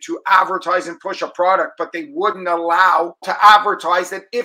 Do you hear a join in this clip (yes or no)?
yes